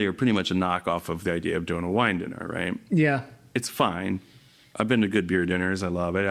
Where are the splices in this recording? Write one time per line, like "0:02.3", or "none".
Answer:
none